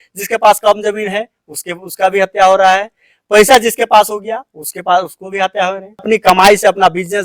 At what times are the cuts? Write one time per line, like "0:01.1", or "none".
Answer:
0:06.0